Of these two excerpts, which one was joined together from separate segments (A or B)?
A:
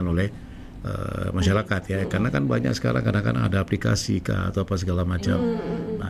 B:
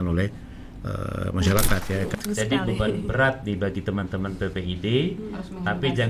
B